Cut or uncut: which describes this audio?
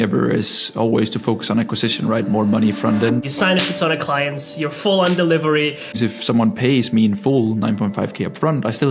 cut